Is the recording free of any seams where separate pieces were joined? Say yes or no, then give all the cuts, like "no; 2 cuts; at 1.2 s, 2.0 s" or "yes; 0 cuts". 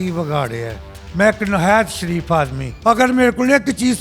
no; 1 cut; at 2.6 s